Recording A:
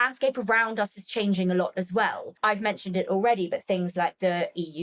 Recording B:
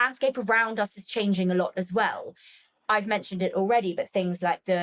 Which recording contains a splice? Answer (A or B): A